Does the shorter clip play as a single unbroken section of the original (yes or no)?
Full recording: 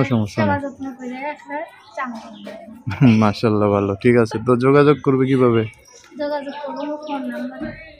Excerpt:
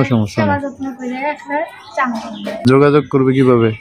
no